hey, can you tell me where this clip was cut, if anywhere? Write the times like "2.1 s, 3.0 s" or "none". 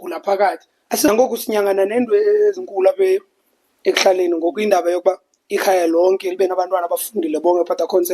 1.1 s